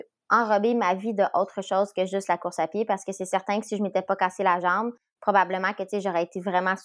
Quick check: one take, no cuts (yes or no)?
yes